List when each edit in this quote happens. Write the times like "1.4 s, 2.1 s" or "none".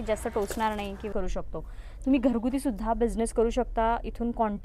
1.1 s

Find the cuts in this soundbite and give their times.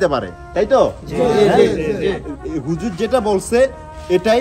none

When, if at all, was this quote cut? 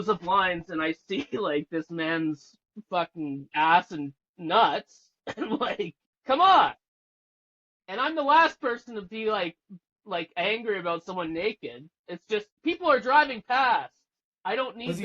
6.1 s, 12.5 s

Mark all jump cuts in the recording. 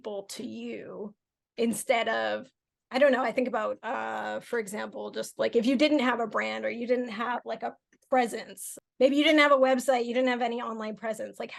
none

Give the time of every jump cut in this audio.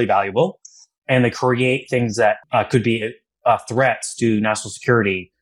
2.4 s

